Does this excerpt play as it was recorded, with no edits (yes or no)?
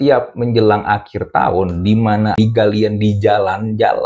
no